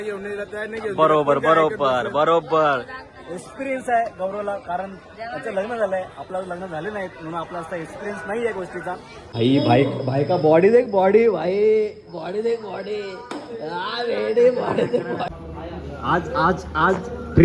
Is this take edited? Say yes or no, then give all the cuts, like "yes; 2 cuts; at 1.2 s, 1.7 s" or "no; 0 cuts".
yes; 2 cuts; at 9.2 s, 15.3 s